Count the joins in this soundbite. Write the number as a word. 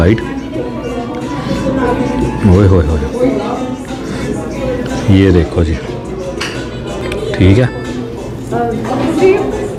zero